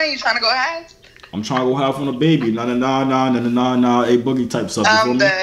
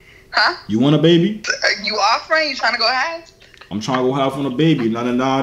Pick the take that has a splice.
second; 1 cut; at 1.5 s

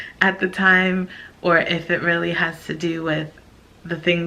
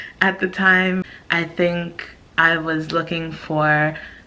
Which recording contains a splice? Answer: second; 1 cut; at 1.2 s

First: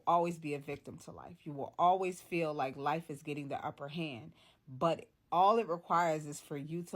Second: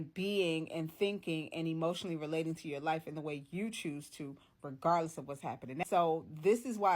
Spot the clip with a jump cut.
second; 1 cut; at 5.8 s

